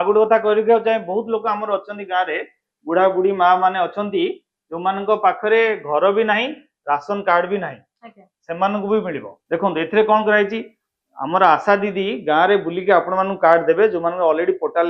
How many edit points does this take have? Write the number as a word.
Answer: one